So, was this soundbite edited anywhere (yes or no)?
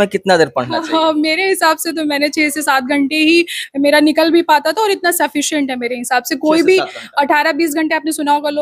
no